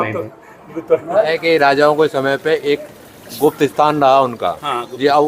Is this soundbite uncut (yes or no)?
no